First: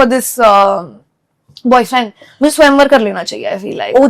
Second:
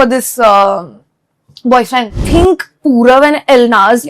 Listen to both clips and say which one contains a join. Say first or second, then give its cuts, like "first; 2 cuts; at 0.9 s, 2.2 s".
second; 1 cut; at 2.3 s